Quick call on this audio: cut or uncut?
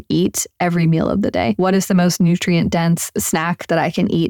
cut